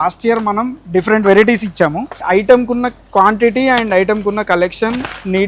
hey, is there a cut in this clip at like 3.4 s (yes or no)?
no